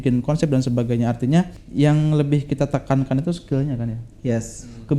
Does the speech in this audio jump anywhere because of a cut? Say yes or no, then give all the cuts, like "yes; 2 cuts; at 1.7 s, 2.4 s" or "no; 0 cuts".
yes; 1 cut; at 1.6 s